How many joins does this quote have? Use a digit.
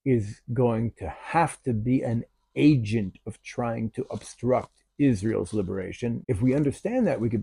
1